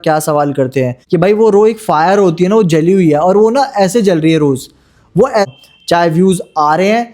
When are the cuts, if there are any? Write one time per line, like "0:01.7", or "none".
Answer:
0:01.0
0:05.5